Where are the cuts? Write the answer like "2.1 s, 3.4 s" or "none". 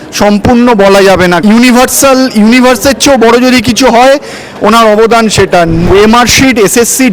1.4 s, 5.8 s